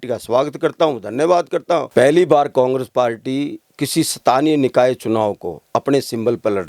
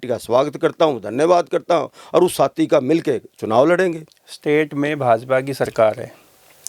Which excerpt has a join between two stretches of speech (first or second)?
first